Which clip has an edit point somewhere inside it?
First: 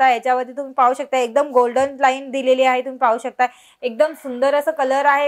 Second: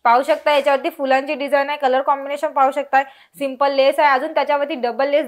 first; 1 cut; at 3.7 s

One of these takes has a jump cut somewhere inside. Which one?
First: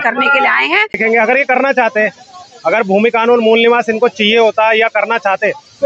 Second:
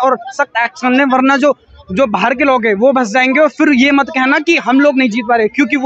first; 1 cut; at 1.0 s

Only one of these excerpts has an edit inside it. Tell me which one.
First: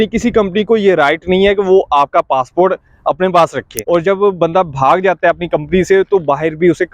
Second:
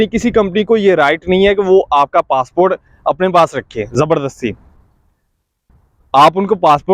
first; 1 cut; at 3.7 s

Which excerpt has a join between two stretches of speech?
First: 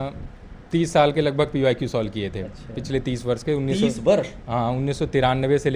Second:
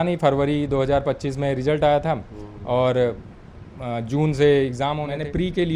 second; 1 cut; at 4.8 s

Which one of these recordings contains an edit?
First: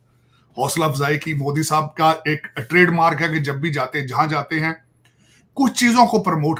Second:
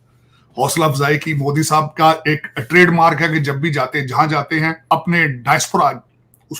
second; 1 cut; at 4.9 s

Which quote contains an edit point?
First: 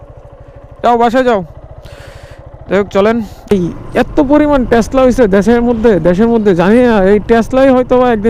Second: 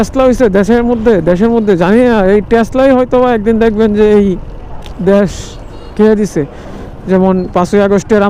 first; 1 cut; at 3.5 s

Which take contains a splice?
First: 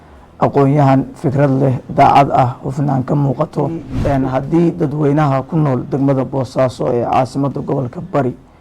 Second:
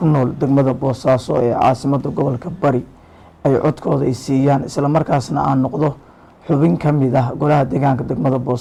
first; 1 cut; at 3.9 s

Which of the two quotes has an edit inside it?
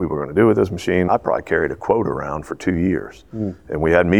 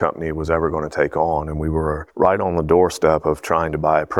first; 1 cut; at 1.1 s

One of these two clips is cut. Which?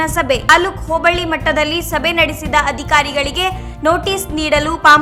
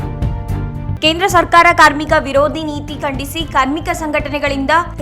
second; 1 cut; at 0.9 s

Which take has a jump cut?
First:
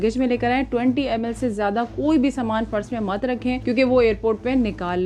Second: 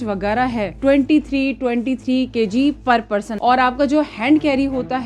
second; 2 cuts; at 0.8 s, 3.3 s

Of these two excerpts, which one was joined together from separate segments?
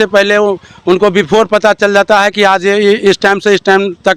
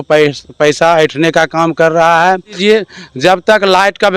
second; 1 cut; at 2.5 s

